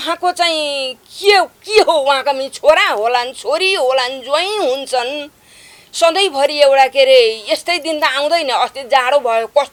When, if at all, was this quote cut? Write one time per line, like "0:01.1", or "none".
none